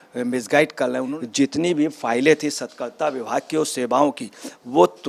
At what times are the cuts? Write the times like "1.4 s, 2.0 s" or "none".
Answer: 1.1 s